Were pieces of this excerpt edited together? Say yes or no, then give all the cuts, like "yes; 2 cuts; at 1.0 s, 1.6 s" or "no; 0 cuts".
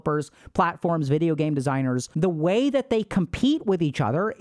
yes; 1 cut; at 2.1 s